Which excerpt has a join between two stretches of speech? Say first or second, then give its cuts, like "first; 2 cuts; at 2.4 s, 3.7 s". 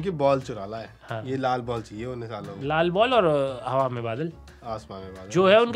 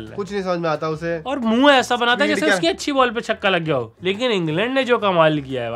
second; 1 cut; at 3.9 s